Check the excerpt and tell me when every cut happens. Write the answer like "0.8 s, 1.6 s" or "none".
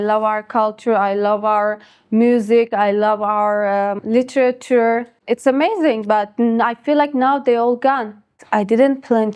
4.0 s, 5.1 s, 8.3 s